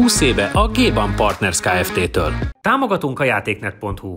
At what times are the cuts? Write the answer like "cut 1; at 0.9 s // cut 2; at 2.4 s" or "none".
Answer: cut 1; at 2.5 s